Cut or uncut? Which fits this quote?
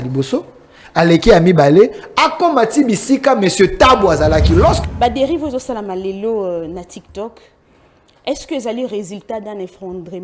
cut